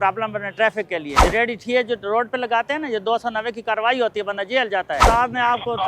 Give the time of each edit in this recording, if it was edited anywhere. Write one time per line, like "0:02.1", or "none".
0:01.1
0:05.0